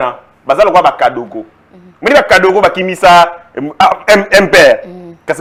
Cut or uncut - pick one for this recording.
uncut